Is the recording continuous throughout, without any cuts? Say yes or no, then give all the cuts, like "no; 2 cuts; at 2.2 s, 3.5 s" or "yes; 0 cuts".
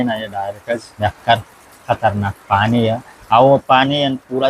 no; 2 cuts; at 0.9 s, 3.1 s